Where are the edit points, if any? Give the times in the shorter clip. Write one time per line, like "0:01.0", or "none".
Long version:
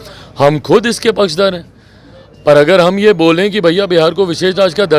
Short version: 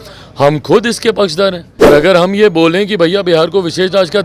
0:01.9